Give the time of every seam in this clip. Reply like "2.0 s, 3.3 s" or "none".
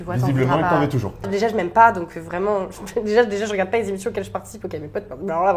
1.3 s

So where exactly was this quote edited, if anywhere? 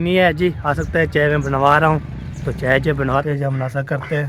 3.2 s

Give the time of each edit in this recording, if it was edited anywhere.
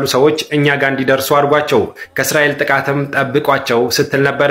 none

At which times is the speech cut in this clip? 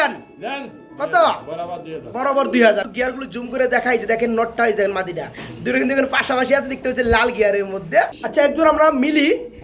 2.9 s, 8.2 s

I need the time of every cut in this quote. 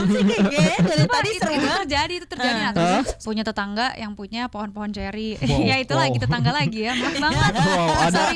3.2 s

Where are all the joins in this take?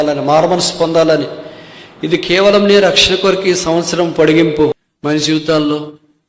4.7 s

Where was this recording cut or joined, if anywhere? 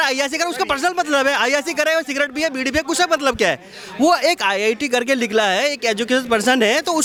none

